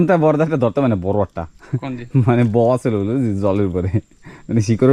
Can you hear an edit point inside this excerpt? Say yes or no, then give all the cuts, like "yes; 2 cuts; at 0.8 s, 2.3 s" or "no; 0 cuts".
no; 0 cuts